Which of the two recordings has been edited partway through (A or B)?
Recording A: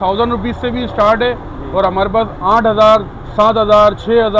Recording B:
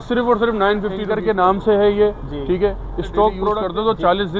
B